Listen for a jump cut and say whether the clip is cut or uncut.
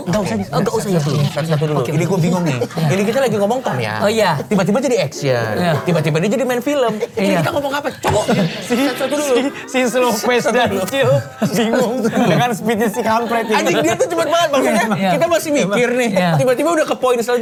uncut